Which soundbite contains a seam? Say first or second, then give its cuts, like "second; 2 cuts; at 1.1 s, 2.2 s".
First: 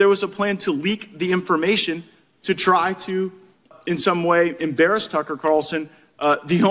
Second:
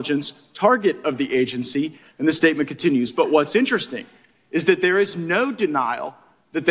second; 1 cut; at 2.0 s